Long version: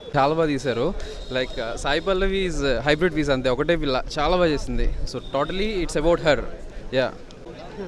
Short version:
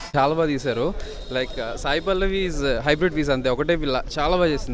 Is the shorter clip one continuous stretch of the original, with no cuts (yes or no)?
yes